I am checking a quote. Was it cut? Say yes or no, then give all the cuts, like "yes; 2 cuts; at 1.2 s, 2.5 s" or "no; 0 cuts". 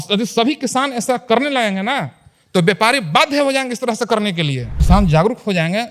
yes; 1 cut; at 4.7 s